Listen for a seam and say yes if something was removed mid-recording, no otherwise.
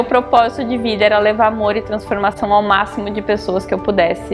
no